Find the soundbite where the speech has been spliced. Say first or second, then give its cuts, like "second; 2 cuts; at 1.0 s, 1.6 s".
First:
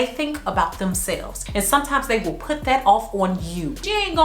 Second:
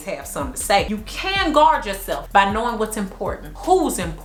first; 1 cut; at 1.3 s